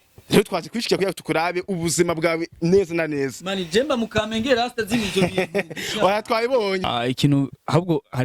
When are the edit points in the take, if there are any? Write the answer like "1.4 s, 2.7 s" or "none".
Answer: 6.9 s